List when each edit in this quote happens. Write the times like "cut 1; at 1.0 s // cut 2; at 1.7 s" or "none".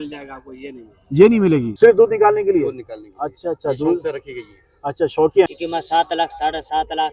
cut 1; at 1.7 s // cut 2; at 5.5 s